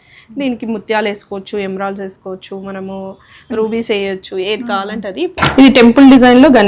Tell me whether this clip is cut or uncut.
cut